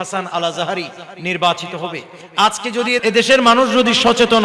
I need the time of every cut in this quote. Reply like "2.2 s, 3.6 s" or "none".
3.0 s